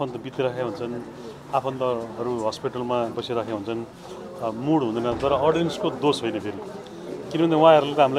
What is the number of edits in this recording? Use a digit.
0